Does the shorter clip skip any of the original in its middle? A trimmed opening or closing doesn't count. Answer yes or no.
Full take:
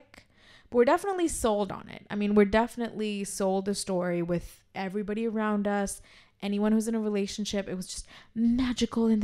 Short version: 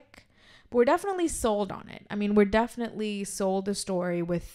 no